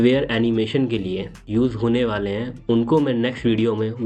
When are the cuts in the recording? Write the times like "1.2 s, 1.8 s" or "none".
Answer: 1.3 s